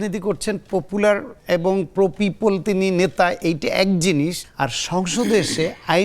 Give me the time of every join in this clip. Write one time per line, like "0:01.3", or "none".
0:01.3
0:04.4

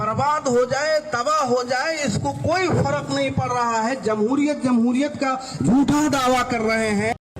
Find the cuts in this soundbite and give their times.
none

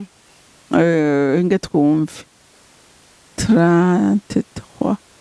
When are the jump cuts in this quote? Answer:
none

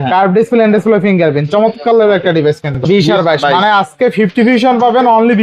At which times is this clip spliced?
0:02.8

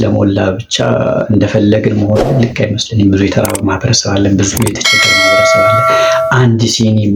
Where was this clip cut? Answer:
none

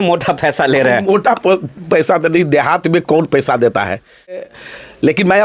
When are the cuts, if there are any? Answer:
0:04.5

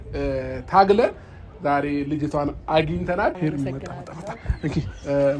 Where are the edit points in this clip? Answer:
0:03.4

